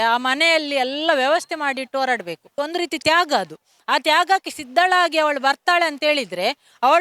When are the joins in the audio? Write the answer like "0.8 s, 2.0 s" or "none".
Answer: 2.5 s

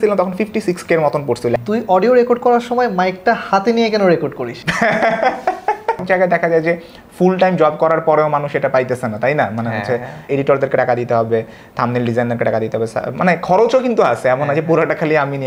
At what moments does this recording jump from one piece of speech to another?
1.6 s, 6.0 s, 10.3 s

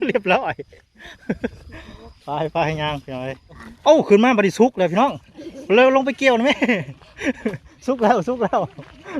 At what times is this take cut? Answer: 3.7 s

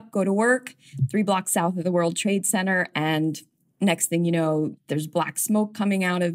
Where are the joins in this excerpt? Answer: 3.7 s, 4.7 s

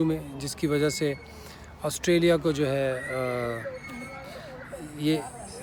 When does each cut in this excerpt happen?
none

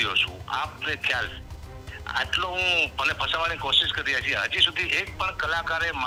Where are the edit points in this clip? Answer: none

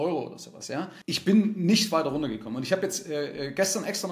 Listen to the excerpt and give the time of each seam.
1.0 s

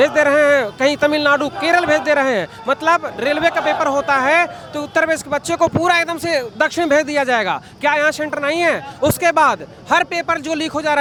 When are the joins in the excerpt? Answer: none

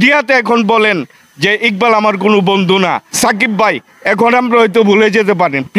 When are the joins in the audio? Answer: 3.1 s

